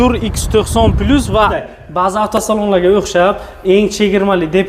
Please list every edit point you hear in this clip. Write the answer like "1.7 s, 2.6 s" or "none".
1.6 s